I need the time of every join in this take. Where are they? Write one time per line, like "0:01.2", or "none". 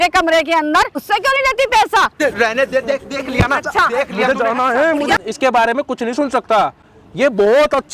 0:01.0
0:02.1
0:05.2